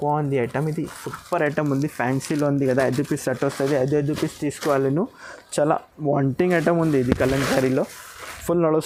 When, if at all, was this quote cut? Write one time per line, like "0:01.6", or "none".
none